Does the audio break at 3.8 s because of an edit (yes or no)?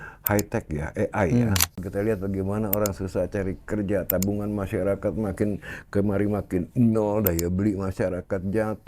no